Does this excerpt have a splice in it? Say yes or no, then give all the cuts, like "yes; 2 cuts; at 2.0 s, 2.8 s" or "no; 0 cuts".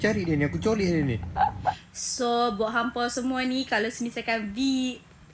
yes; 1 cut; at 1.8 s